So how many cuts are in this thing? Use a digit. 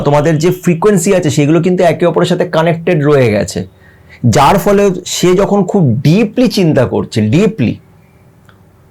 0